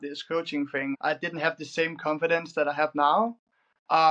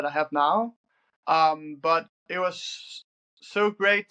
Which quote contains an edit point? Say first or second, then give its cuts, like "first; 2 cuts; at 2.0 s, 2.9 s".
first; 1 cut; at 1.0 s